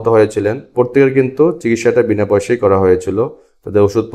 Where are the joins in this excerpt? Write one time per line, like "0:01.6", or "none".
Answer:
none